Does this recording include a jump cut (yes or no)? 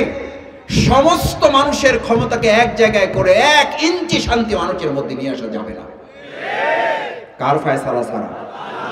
no